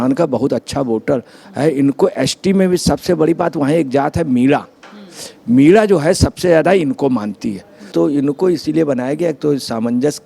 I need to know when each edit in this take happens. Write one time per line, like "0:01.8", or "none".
0:07.9